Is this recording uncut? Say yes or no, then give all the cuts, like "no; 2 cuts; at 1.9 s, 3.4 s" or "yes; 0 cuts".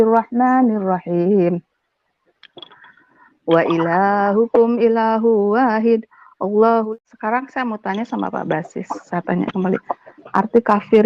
no; 1 cut; at 6.9 s